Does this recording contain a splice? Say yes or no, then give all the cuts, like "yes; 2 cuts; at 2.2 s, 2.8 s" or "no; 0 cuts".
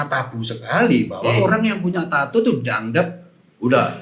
no; 0 cuts